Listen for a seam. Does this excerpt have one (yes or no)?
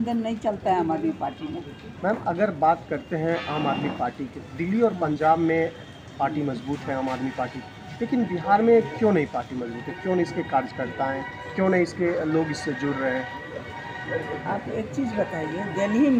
no